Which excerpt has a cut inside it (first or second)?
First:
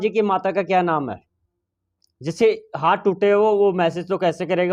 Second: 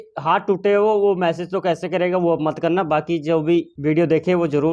second